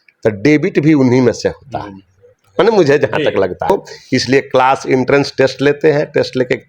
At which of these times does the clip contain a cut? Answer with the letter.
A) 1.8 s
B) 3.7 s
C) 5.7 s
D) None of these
B